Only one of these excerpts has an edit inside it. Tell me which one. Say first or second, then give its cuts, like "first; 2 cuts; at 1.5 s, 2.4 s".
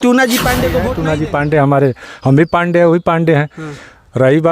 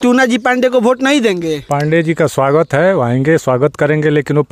first; 1 cut; at 0.9 s